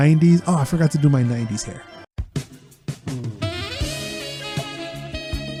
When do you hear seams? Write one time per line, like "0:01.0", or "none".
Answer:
none